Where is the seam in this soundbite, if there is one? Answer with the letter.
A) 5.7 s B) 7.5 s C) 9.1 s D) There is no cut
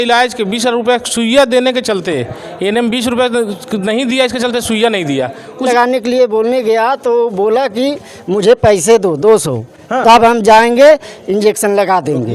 A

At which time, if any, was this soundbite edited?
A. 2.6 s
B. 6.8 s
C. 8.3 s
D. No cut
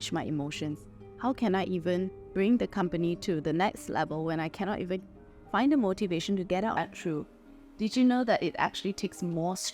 B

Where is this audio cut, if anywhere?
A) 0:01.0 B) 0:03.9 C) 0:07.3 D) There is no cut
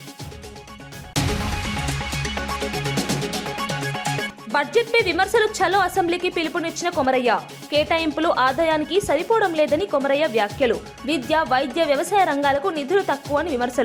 A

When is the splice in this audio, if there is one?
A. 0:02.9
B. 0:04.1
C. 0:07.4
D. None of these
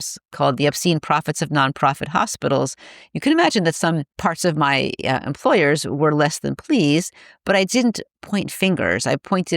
B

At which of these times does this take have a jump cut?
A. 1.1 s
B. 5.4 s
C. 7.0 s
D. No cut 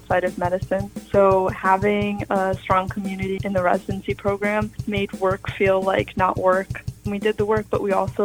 C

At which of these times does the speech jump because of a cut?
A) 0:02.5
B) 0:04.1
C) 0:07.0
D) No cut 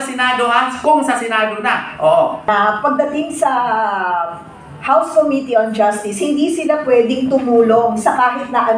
A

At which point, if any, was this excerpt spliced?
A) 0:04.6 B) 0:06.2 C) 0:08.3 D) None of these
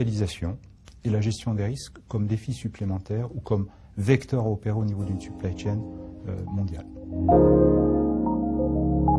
C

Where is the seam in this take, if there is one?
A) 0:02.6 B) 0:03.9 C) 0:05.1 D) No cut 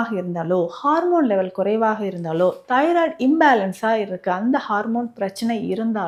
D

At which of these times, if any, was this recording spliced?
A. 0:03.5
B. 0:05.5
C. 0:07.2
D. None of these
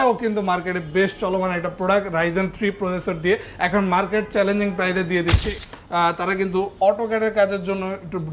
B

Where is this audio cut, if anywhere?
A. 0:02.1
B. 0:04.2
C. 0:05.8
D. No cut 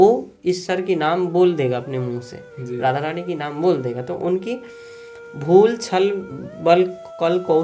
D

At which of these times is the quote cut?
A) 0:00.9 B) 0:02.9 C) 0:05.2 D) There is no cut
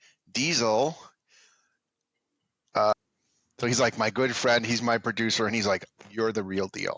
B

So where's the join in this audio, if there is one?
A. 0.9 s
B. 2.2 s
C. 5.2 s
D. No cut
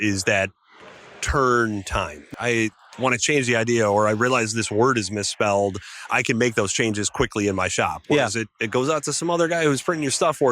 B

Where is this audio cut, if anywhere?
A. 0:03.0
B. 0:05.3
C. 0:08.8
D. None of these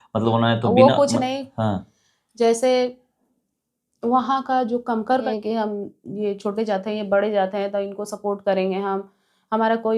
B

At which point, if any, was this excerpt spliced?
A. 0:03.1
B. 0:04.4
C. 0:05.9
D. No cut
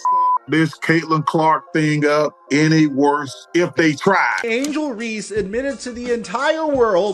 B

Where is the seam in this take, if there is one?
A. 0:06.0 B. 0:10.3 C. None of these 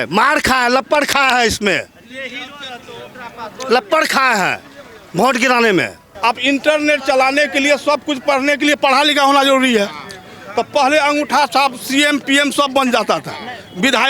A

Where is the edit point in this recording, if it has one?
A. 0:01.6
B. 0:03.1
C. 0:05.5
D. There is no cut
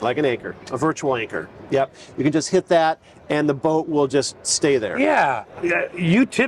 C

